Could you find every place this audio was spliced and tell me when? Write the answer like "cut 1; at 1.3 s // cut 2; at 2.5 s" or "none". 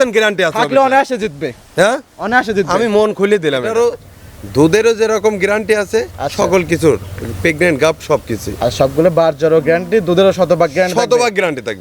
cut 1; at 3.7 s